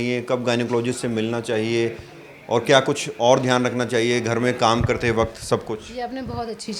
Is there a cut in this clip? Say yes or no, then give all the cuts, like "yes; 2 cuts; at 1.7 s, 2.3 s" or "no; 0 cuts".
no; 0 cuts